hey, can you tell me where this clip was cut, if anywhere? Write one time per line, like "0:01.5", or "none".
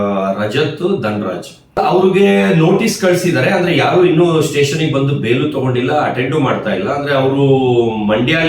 0:01.8